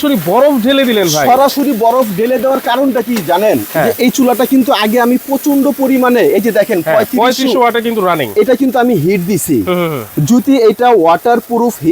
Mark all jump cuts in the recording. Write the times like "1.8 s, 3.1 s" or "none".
none